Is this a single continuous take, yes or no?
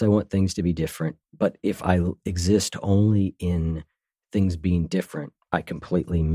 yes